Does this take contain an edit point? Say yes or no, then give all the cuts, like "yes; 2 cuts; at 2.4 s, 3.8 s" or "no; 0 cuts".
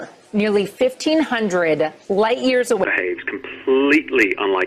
no; 0 cuts